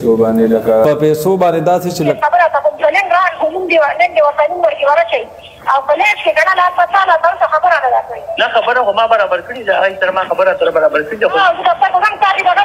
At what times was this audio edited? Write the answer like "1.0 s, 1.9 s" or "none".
2.1 s, 11.4 s